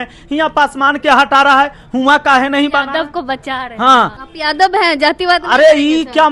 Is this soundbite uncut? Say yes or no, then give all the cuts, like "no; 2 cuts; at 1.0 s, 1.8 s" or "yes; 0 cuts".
no; 1 cut; at 4.2 s